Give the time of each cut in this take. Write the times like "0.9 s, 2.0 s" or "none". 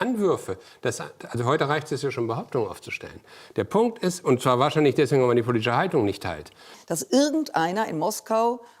6.8 s